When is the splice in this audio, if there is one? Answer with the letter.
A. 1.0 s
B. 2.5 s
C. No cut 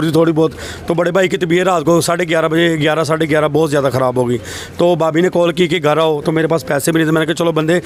C